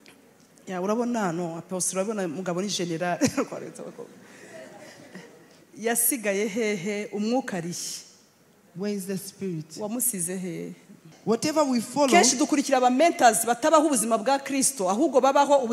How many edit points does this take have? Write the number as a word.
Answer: two